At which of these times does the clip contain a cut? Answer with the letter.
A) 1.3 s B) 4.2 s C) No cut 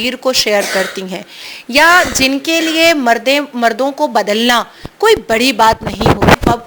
C